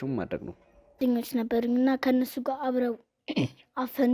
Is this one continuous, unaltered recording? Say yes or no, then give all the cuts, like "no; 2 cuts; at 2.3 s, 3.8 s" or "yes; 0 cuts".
no; 1 cut; at 1.0 s